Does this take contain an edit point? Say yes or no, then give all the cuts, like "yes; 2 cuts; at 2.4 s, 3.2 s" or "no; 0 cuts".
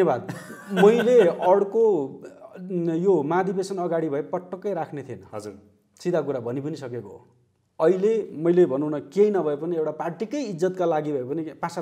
no; 0 cuts